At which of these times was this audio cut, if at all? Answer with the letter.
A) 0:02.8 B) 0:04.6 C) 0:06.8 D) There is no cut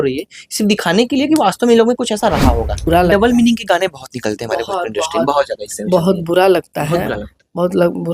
A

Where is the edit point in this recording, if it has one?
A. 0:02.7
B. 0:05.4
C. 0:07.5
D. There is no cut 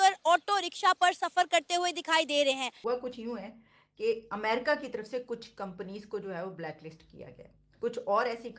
A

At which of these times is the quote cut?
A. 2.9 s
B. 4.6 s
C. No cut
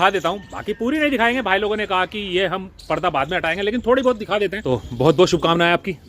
B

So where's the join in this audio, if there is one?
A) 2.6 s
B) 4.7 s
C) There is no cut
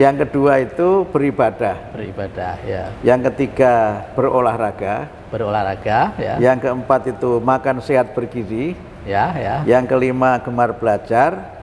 C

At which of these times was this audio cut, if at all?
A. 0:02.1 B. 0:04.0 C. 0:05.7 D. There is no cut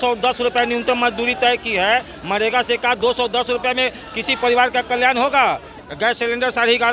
C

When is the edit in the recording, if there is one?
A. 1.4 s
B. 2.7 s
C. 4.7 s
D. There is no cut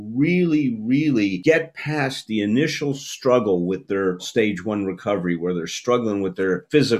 A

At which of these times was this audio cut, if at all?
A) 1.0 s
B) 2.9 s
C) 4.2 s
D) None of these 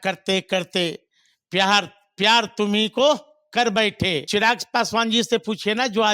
C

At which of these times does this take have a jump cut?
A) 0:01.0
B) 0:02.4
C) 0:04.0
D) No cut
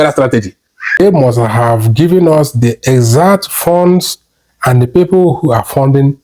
A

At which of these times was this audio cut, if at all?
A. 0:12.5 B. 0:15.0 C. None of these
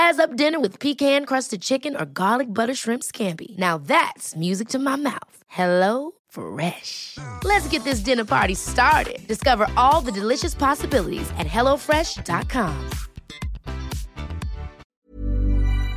B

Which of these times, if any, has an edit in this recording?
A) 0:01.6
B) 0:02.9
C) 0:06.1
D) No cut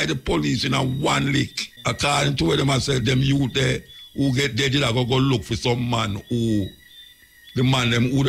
A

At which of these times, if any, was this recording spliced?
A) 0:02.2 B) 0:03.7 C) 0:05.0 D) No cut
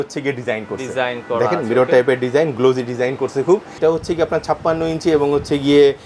B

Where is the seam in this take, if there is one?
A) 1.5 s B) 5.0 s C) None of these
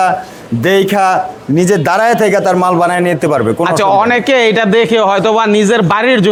C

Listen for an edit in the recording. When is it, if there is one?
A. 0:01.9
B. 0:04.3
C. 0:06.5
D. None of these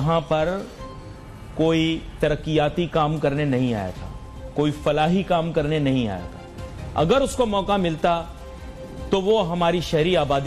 D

